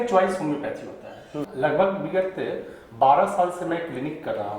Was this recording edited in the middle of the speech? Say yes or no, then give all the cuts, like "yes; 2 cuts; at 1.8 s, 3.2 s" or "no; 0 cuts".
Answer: yes; 1 cut; at 1.4 s